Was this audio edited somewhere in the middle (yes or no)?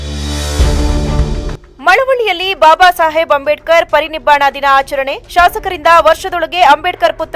yes